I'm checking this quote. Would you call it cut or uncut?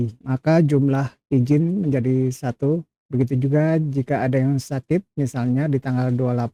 uncut